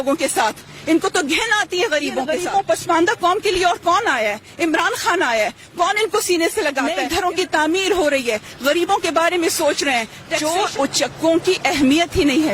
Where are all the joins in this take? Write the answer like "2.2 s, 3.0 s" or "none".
2.3 s, 7.0 s, 10.2 s